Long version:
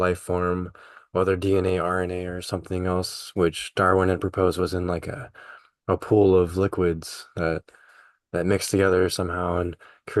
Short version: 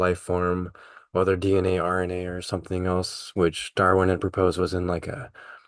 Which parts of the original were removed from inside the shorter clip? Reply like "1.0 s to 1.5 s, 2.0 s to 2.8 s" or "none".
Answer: none